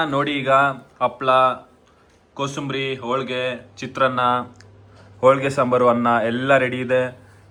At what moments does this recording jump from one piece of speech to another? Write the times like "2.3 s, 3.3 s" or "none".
none